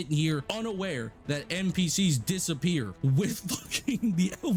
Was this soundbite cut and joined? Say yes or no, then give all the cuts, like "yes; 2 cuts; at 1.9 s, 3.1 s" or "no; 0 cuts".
no; 0 cuts